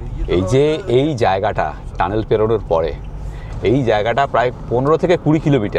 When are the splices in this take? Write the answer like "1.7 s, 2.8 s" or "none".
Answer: none